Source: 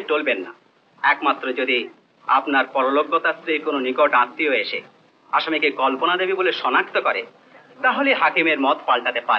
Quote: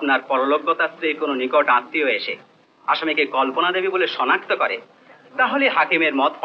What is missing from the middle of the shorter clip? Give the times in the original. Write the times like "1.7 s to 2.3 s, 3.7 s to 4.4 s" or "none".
none